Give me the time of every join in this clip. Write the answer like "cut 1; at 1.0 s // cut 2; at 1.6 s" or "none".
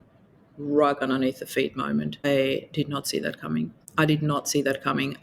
cut 1; at 2.2 s // cut 2; at 3.8 s

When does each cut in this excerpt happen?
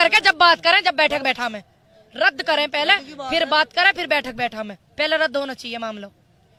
none

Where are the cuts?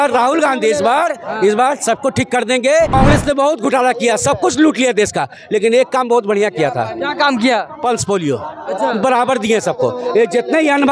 cut 1; at 2.9 s

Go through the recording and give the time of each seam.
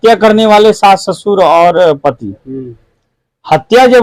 none

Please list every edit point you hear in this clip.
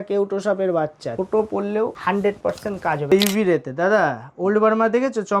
cut 1; at 1.1 s // cut 2; at 2.0 s // cut 3; at 3.1 s

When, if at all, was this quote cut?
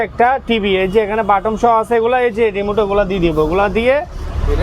none

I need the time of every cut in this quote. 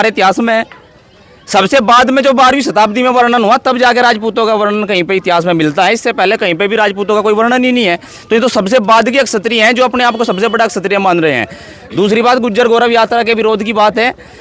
none

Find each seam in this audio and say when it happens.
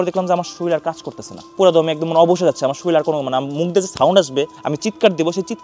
none

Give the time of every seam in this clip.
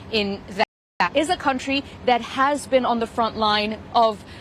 cut 1; at 1.0 s

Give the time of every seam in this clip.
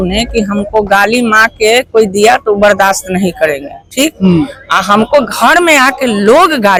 none

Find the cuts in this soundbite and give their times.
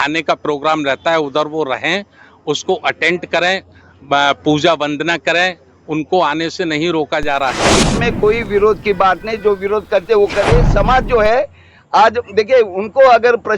cut 1; at 7.8 s

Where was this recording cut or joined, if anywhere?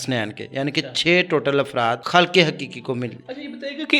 cut 1; at 2.0 s

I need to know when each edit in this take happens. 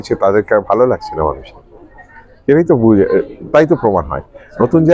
none

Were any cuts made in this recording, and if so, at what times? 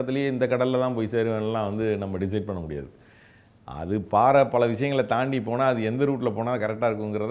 none

